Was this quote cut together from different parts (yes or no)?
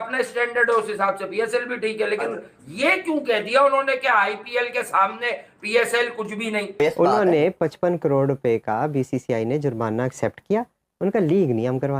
yes